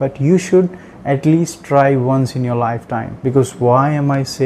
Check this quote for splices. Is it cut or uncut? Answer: cut